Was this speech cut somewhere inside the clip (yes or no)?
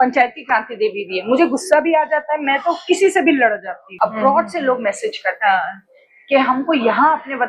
yes